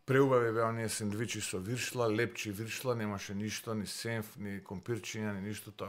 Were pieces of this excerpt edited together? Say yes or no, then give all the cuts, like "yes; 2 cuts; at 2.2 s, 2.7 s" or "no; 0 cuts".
no; 0 cuts